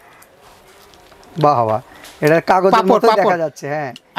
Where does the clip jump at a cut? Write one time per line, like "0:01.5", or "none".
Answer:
none